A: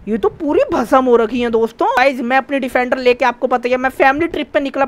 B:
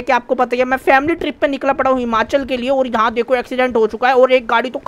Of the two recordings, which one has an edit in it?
A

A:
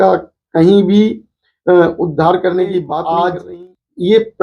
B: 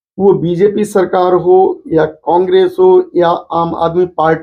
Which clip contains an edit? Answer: A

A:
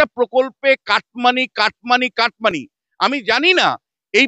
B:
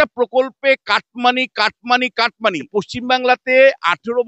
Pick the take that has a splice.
B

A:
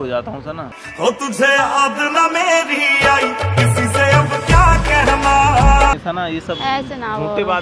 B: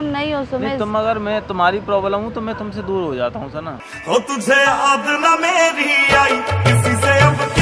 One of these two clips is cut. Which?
A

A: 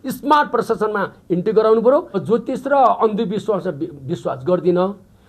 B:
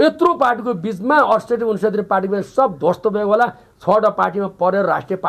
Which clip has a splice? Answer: A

